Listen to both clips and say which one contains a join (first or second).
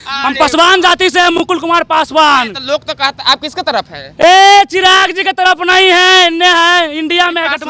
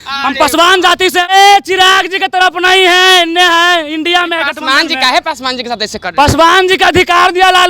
second